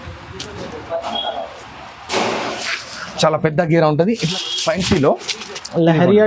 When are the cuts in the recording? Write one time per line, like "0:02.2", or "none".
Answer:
0:04.2